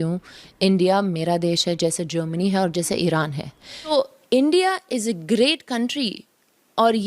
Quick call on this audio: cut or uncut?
cut